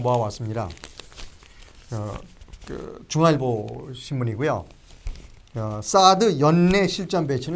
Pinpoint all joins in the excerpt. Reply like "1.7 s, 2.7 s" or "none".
none